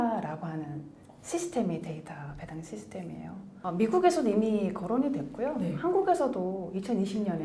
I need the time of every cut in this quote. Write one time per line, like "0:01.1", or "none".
none